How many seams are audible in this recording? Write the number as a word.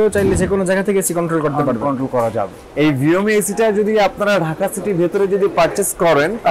one